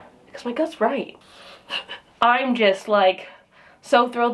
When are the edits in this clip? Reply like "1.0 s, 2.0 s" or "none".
1.6 s